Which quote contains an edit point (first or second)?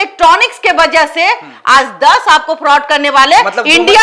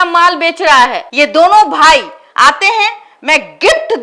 second